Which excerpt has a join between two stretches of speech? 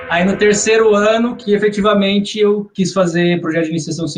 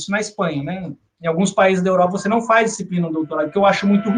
first; 2 cuts; at 1.4 s, 2.7 s

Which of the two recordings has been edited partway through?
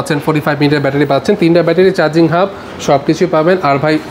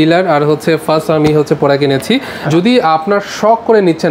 second; 1 cut; at 2.3 s

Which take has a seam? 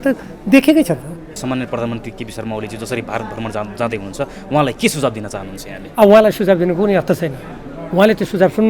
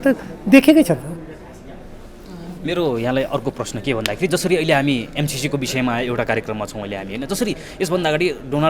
first; 1 cut; at 1.4 s

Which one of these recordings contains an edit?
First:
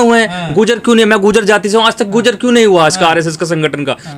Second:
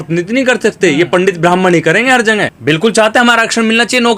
second; 1 cut; at 2.5 s

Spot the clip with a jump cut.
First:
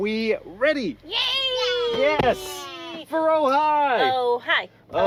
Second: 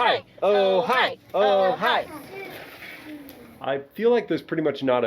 second; 2 cuts; at 2.2 s, 3.5 s

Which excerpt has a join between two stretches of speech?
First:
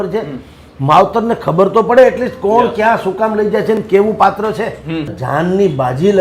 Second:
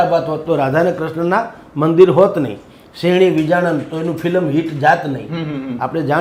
first; 1 cut; at 5.2 s

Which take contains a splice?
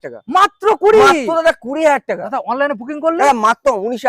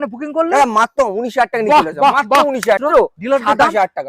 second; 1 cut; at 2.8 s

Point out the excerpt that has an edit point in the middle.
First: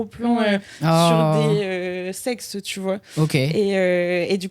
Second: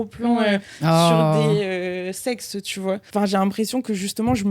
second; 1 cut; at 3.0 s

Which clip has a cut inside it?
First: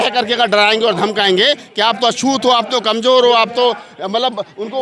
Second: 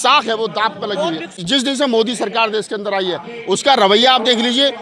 second; 1 cut; at 1.4 s

